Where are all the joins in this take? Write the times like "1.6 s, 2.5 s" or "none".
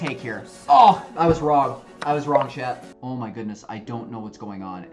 2.9 s